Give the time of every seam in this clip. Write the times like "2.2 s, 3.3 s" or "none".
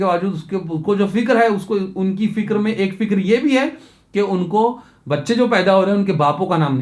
none